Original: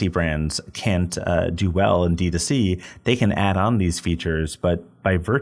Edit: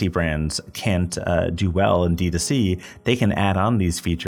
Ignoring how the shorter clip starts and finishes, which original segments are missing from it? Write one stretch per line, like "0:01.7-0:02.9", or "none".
none